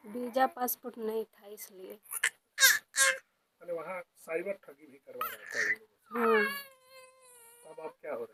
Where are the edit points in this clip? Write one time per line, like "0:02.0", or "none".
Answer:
none